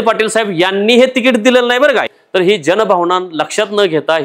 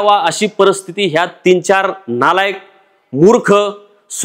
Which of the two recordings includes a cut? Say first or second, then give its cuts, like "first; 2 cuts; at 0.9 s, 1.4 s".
first; 1 cut; at 2.1 s